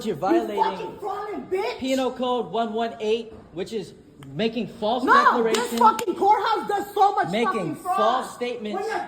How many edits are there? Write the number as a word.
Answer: one